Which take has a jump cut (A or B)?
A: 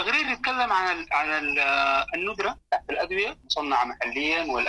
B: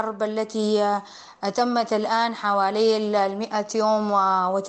A